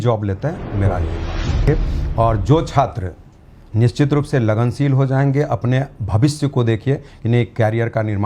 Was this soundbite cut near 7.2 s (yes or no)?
no